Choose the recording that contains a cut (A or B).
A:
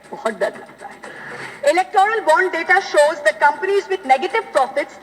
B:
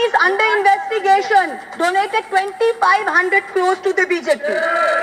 A